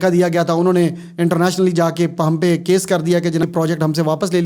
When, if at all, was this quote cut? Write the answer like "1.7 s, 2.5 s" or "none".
3.4 s